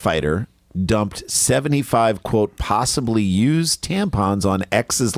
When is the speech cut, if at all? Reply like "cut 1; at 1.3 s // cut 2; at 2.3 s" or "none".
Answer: none